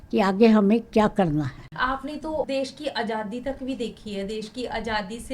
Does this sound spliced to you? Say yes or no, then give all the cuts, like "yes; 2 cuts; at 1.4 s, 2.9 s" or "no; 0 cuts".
yes; 1 cut; at 1.6 s